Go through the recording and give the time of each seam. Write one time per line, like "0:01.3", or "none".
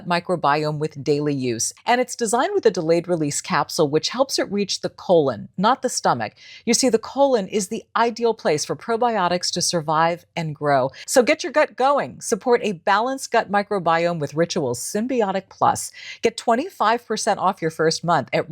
0:01.7
0:11.0